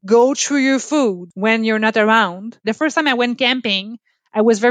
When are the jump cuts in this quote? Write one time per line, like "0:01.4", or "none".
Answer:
0:01.3
0:02.6